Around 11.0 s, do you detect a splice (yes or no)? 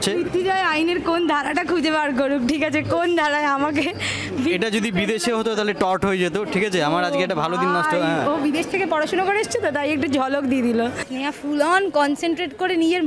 yes